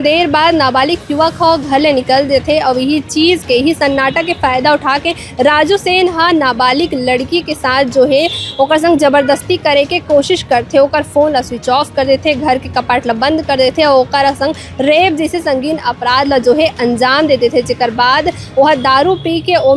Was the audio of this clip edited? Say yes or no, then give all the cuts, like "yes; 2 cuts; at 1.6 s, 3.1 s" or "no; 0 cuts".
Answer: no; 0 cuts